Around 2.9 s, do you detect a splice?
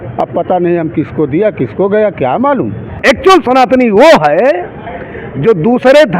yes; 1 cut; at 2.9 s

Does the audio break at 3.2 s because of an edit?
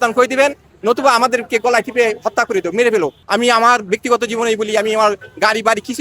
yes; 1 cut; at 3.2 s

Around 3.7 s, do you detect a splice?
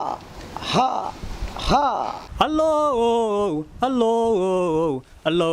no; 1 cut; at 2.2 s

